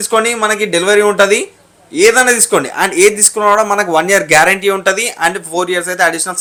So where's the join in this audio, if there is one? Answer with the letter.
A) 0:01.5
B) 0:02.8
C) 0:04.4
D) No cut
D